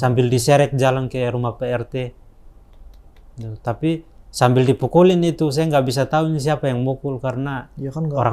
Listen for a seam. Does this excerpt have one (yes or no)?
no